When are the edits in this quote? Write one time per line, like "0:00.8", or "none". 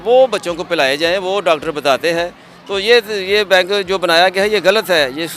none